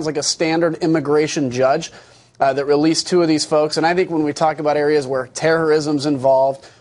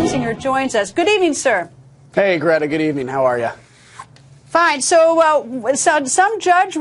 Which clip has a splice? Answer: first; 1 cut; at 1.6 s

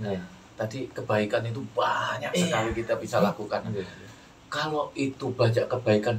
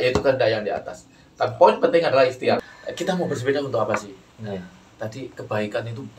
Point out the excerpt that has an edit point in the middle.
second; 1 cut; at 2.6 s

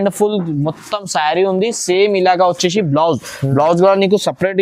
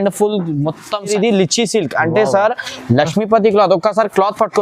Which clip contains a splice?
second; 1 cut; at 1.1 s

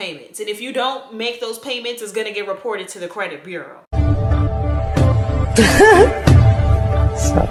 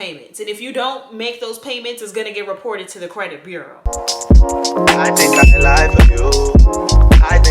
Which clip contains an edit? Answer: second; 1 cut; at 3.9 s

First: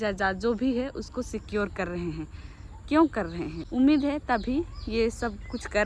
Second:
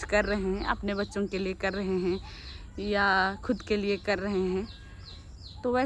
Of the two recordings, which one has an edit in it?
first; 1 cut; at 3.5 s

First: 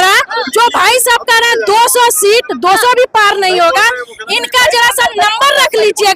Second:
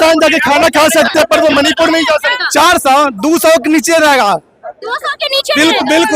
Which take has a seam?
second; 1 cut; at 2.4 s

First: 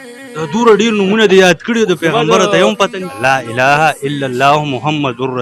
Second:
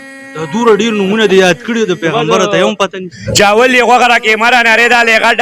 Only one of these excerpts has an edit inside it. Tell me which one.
second; 1 cut; at 3.1 s

